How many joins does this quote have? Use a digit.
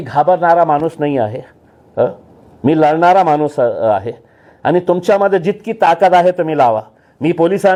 0